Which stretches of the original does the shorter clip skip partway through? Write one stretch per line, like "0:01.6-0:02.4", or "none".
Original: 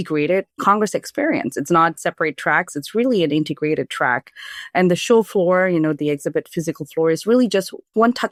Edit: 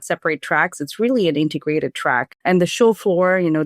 0:04.2-0:04.6